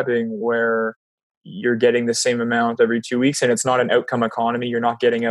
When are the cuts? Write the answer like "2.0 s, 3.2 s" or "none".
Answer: none